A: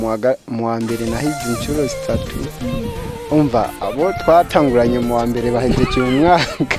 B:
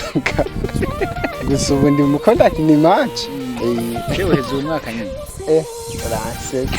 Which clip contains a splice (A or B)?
B